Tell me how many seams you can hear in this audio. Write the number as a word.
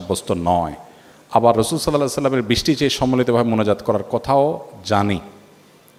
zero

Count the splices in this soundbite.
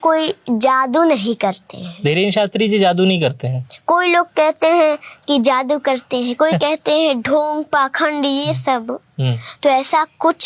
zero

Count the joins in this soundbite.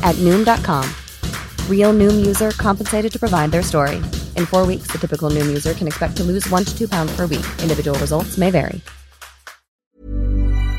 one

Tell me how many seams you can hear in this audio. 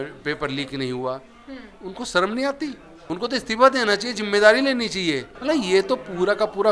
two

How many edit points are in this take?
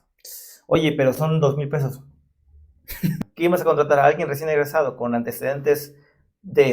one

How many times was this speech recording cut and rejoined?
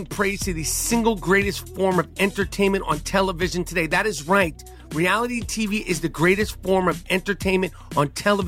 zero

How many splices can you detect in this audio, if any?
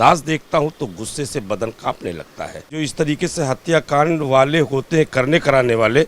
one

